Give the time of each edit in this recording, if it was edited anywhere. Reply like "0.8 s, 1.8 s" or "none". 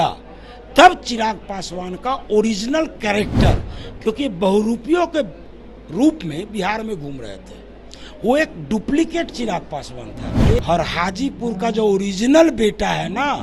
10.6 s